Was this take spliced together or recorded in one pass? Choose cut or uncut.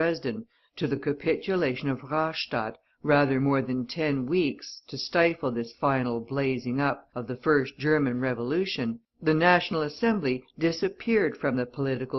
uncut